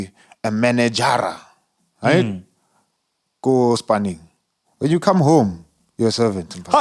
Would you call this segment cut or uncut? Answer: uncut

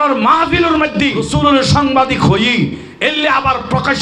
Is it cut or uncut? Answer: cut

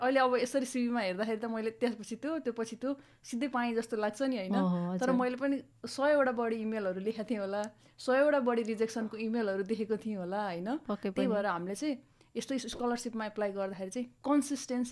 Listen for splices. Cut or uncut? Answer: uncut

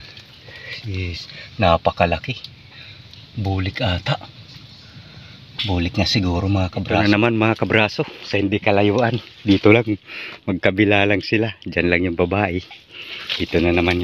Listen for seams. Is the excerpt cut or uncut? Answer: cut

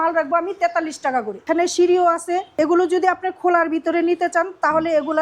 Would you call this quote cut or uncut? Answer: cut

